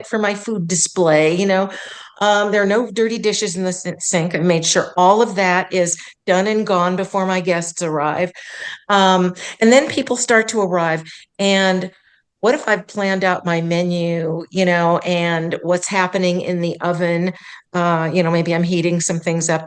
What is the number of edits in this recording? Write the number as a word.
zero